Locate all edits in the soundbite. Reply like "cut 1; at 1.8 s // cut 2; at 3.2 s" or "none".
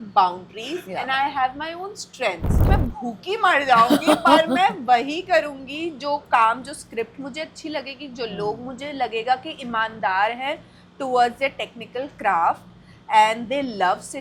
cut 1; at 2.6 s